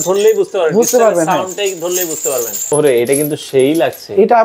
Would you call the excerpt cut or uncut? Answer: cut